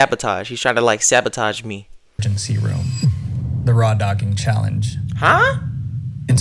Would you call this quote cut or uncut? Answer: cut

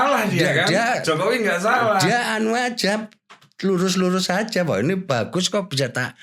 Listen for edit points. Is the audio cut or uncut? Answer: uncut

